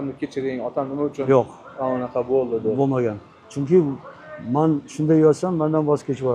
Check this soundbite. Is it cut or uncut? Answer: uncut